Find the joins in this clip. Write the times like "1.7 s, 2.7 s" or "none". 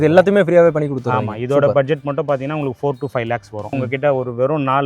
3.7 s